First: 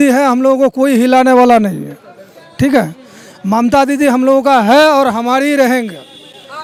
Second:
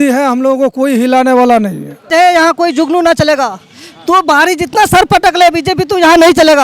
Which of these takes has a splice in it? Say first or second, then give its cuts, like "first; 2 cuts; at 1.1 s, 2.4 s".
second; 1 cut; at 2.1 s